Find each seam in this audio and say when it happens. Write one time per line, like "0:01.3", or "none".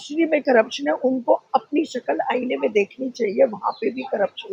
none